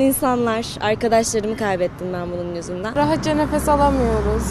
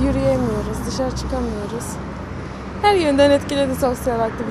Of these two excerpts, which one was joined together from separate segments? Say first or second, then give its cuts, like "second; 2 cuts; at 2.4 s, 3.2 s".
first; 1 cut; at 2.9 s